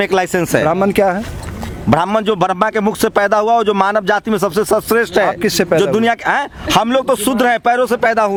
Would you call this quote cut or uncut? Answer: uncut